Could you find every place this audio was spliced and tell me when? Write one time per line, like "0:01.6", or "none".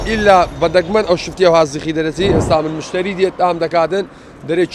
0:02.4

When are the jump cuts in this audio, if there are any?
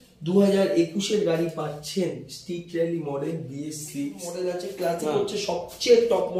0:04.3

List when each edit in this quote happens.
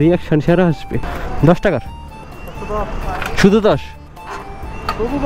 0:01.1

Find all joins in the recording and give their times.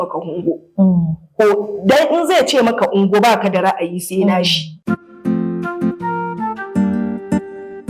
0:04.7

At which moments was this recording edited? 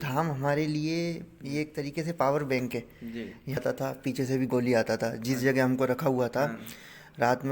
0:03.6

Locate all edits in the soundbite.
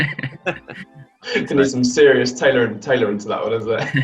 none

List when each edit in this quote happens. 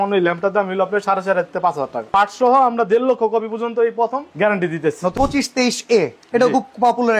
0:02.1
0:05.1

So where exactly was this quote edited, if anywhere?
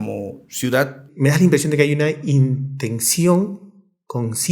0:01.0

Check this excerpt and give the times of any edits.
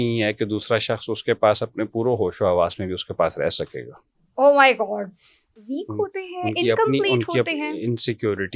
0:05.5

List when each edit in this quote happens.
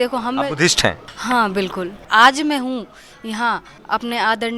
0:01.1
0:02.1
0:03.7

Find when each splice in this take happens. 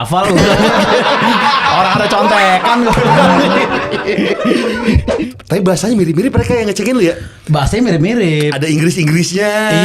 0:05.1

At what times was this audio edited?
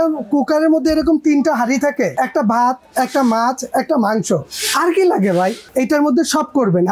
0:02.1
0:05.6

